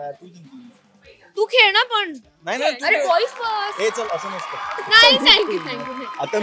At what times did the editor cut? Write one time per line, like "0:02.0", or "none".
0:04.8